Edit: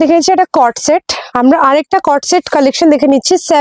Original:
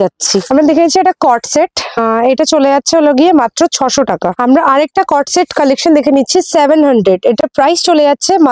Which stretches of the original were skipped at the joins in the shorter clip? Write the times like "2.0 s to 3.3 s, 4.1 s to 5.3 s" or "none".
1.9 s to 4.3 s

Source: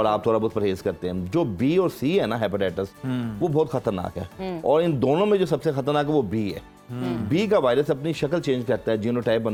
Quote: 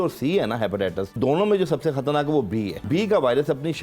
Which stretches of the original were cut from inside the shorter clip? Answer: 3.0 s to 5.0 s, 6.6 s to 7.2 s

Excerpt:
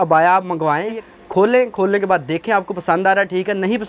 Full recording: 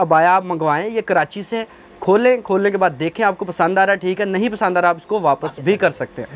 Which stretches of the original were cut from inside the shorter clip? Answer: 1.0 s to 1.7 s

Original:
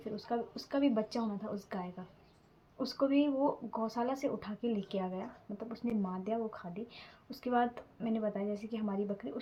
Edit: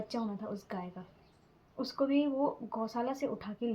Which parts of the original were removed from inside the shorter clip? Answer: none

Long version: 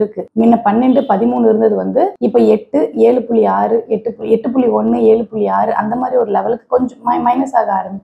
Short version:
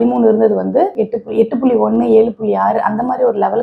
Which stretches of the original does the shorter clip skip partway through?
2.1 s to 3.9 s

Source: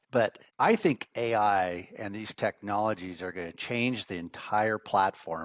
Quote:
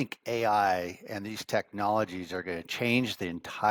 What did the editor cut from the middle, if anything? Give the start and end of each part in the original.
none

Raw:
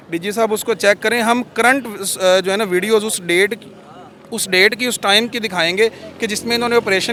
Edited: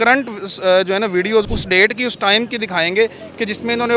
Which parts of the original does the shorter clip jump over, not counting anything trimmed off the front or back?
3.0 s to 4.3 s

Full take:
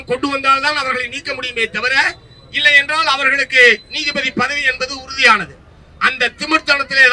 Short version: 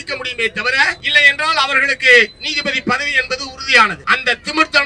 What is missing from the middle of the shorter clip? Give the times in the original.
2.2 s to 2.5 s, 5.5 s to 5.9 s

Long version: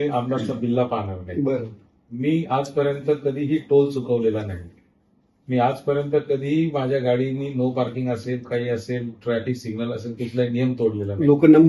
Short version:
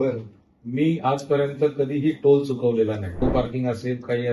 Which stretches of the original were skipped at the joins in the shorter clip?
4.7 s to 7.6 s

